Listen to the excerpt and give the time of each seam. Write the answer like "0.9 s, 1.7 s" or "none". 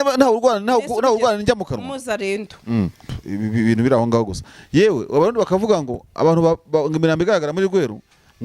3.0 s